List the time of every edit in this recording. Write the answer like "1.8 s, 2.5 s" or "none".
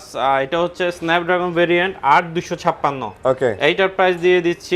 none